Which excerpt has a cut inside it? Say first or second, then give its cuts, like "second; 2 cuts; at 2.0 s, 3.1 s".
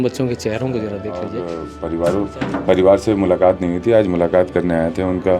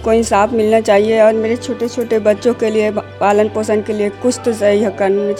first; 1 cut; at 1.4 s